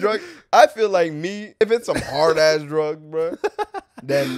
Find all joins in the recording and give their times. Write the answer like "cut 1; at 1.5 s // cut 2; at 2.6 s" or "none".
cut 1; at 1.6 s